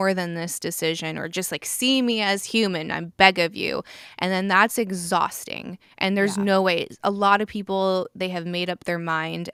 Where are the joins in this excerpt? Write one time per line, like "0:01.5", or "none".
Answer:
none